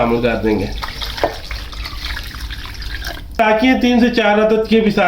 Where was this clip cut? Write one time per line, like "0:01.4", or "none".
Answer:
0:03.4